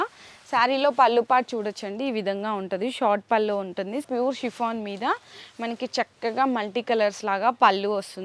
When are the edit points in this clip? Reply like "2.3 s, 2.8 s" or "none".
4.0 s